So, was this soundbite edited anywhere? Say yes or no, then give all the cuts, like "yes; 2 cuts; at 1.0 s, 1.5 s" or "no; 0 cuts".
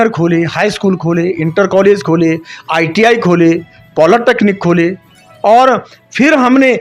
no; 0 cuts